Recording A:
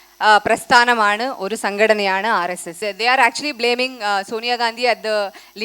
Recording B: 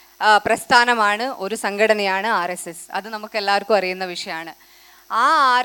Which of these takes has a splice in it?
A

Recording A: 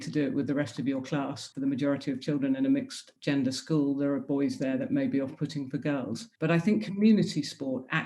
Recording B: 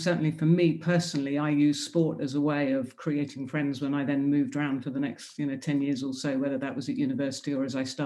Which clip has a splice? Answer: A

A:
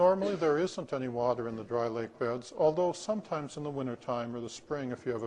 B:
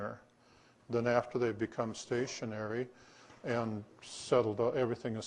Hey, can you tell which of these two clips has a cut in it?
A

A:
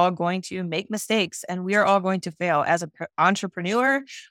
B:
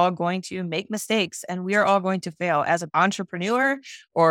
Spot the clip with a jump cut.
B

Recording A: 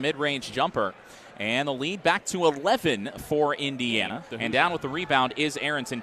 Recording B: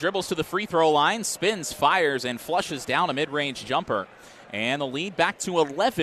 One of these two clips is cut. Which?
A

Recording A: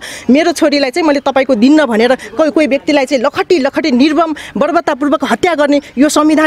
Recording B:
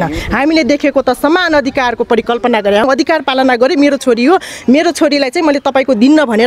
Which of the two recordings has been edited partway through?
B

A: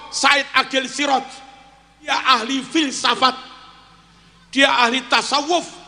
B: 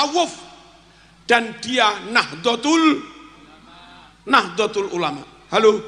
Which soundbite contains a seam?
A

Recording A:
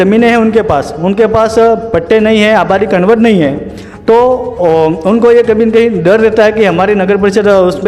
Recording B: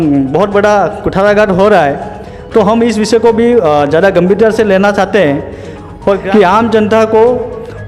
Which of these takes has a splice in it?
B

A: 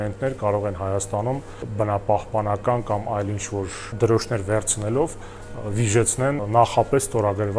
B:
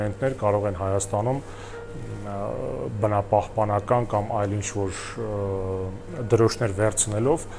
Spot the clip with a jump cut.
A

